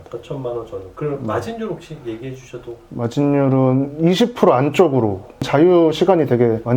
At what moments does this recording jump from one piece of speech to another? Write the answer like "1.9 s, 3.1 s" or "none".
5.4 s